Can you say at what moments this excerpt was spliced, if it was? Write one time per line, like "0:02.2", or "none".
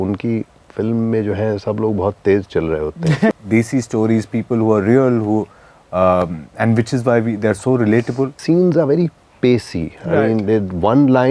0:03.3
0:08.4